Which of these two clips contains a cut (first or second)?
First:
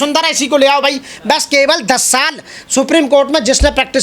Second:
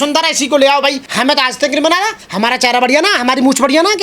second